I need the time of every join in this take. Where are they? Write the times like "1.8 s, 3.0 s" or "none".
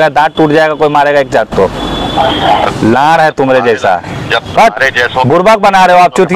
none